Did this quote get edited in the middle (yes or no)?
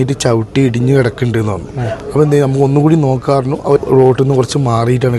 yes